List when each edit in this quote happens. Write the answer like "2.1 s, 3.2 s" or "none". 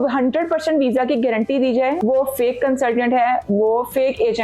2.0 s